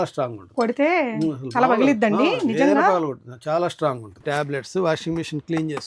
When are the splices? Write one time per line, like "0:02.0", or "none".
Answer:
0:04.1